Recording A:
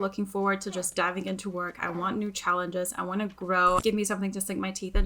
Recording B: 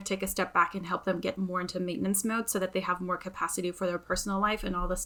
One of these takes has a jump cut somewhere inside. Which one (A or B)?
A